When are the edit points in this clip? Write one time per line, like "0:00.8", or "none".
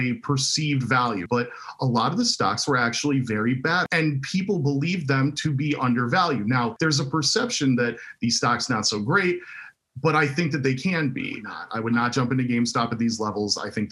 0:01.2
0:03.8
0:06.7
0:11.6